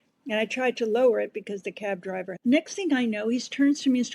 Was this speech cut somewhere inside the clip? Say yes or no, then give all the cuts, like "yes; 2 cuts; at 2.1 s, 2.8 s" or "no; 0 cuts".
yes; 1 cut; at 2.3 s